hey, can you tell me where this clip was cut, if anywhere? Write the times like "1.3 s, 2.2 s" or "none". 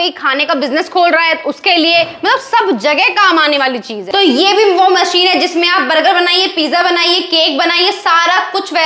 4.0 s

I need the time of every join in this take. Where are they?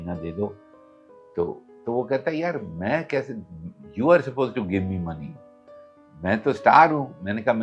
none

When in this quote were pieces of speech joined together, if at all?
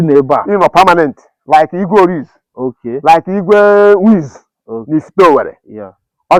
none

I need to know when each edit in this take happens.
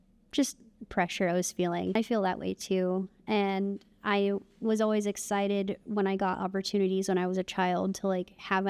1.9 s

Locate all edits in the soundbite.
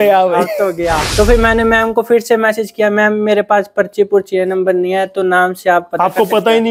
1.1 s

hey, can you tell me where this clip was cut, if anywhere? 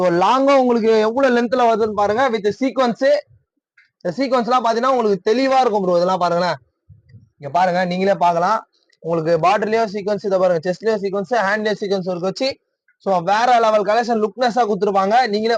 none

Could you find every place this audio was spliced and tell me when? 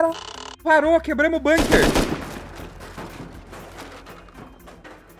none

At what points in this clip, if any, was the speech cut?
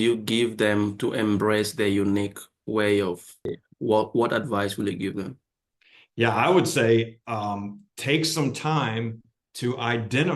3.6 s

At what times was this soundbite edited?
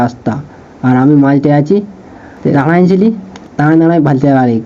none

